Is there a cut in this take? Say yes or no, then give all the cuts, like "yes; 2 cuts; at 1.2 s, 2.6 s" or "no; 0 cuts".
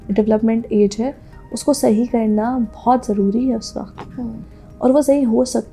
no; 0 cuts